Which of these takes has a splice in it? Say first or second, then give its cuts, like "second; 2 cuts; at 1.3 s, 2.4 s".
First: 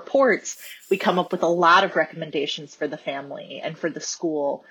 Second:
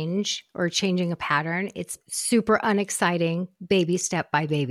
second; 1 cut; at 2.0 s